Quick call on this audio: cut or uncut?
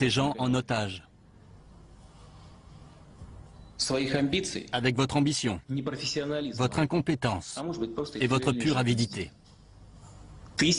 uncut